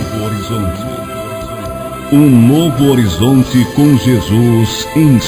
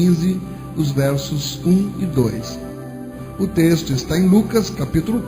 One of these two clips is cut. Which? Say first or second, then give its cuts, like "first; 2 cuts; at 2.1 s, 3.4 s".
second; 1 cut; at 3.0 s